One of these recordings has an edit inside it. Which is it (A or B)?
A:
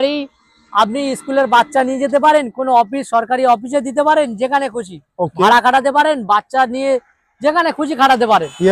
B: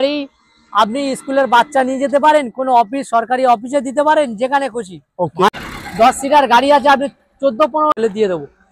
B